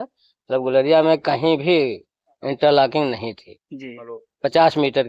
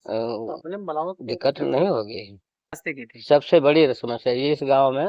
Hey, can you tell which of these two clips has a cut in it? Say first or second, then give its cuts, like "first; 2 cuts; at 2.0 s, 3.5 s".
second; 1 cut; at 2.9 s